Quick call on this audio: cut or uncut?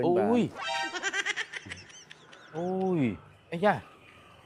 uncut